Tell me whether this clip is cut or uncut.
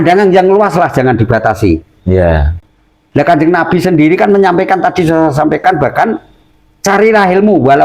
uncut